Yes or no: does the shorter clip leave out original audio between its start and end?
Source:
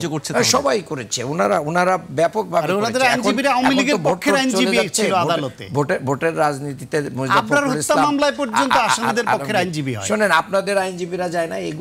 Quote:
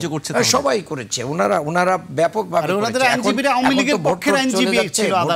no